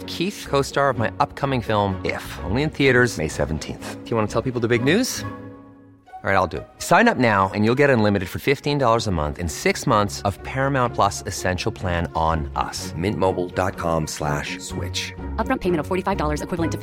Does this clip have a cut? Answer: no; 0 cuts

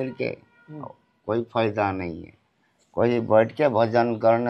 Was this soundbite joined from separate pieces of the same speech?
no; 0 cuts

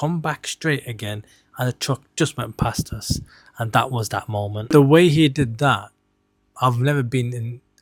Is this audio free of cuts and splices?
yes; 0 cuts

